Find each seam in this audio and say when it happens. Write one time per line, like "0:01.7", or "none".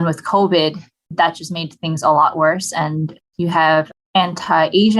0:01.1